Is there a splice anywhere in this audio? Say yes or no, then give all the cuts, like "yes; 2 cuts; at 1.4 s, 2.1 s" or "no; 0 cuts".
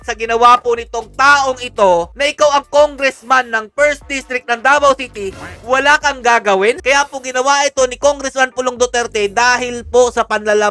no; 0 cuts